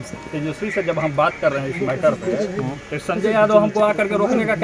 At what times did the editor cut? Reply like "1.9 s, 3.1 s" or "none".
none